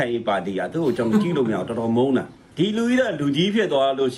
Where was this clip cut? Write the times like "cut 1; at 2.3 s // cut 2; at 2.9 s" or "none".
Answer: cut 1; at 2.4 s